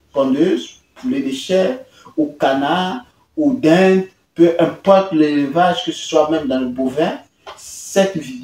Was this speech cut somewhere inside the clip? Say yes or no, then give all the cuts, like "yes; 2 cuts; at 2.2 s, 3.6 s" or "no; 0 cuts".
no; 0 cuts